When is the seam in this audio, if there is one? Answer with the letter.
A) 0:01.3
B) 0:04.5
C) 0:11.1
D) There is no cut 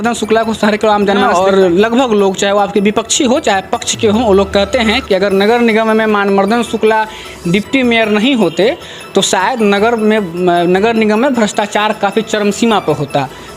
A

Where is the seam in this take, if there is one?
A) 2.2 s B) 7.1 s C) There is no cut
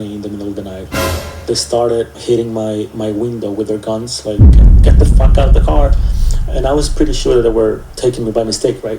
A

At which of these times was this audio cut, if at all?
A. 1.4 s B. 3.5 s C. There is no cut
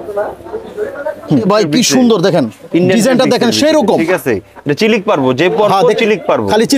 A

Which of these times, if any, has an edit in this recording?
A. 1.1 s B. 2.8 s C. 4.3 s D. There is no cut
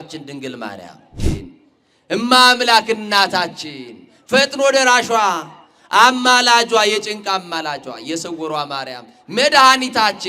A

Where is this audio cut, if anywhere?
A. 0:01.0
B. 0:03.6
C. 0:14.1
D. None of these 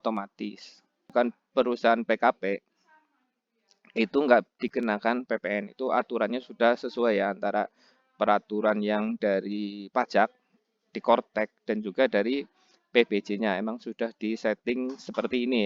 A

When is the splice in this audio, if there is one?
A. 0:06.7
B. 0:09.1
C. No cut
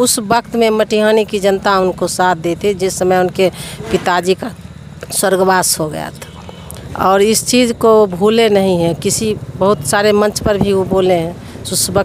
C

